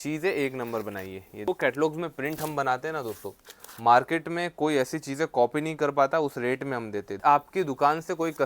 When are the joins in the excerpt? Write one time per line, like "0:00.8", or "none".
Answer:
0:01.5
0:07.2